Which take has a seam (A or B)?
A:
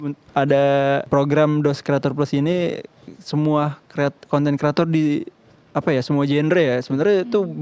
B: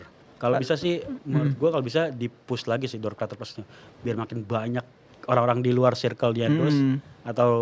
A